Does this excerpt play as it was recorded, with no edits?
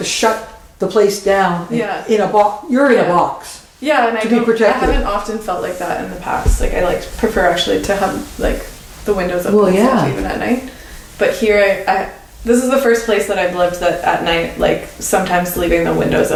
yes; 0 cuts

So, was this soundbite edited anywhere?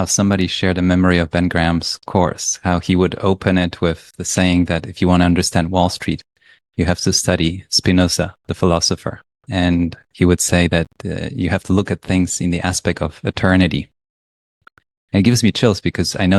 no; 0 cuts

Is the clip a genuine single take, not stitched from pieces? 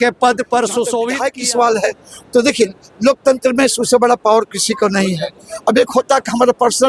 no; 1 cut; at 1.1 s

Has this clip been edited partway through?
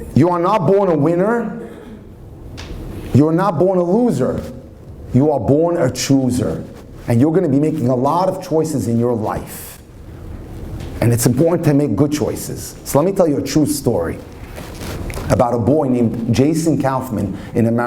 no; 0 cuts

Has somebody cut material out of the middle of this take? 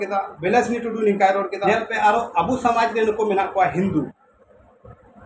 yes; 1 cut; at 1.6 s

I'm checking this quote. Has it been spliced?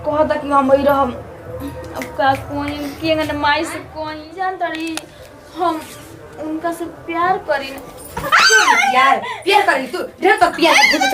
yes; 1 cut; at 3.9 s

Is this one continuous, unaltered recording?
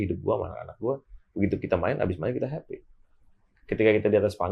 yes; 0 cuts

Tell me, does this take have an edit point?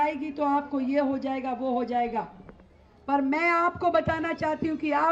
no; 0 cuts

